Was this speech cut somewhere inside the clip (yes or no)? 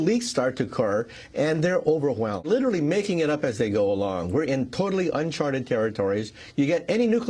yes